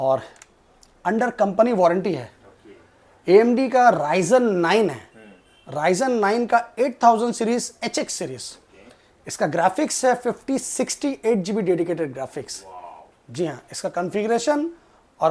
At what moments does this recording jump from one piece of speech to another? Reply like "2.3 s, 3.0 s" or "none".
none